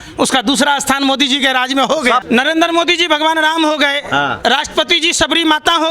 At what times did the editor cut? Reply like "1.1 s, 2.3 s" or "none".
2.2 s